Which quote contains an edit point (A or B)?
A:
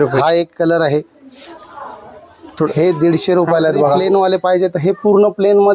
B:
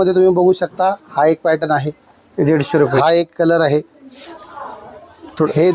A